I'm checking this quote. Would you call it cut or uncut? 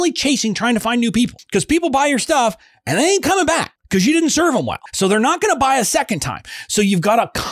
cut